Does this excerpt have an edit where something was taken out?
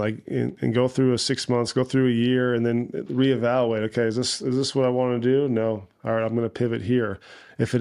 no; 0 cuts

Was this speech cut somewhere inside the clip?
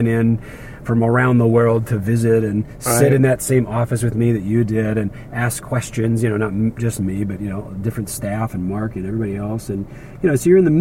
no; 0 cuts

